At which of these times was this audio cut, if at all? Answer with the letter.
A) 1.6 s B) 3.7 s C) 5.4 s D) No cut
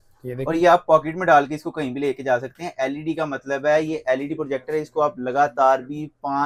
D